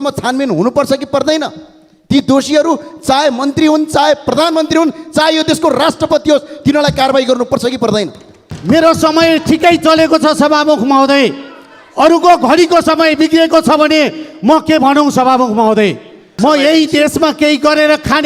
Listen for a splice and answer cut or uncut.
cut